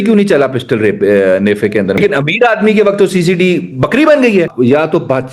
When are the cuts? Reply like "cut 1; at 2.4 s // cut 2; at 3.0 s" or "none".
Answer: cut 1; at 2.0 s // cut 2; at 4.5 s